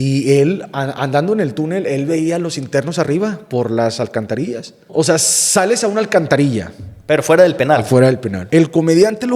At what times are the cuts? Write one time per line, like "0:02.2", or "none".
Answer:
0:04.9
0:08.3

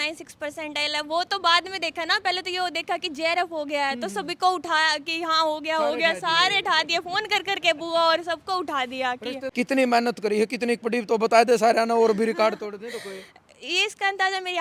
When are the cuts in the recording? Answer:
0:09.5

